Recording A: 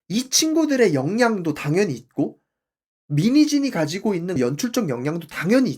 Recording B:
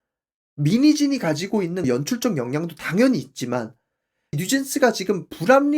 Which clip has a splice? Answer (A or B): B